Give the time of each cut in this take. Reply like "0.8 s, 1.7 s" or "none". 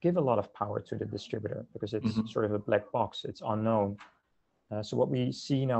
none